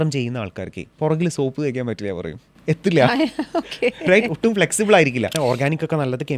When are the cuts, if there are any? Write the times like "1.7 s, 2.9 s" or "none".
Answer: 5.3 s

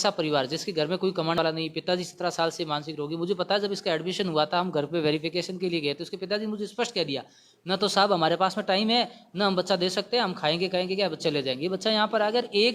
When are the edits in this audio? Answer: 1.4 s

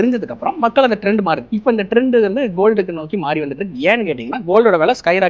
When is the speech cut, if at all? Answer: 1.5 s

